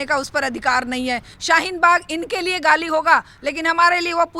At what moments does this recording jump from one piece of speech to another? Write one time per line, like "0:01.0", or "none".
0:01.3